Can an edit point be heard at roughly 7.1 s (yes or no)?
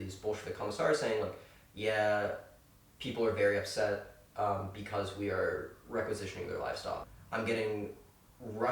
yes